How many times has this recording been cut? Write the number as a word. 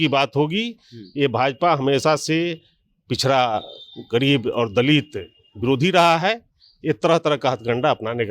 zero